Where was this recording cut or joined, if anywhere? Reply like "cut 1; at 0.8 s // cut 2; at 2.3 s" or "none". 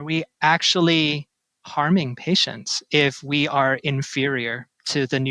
none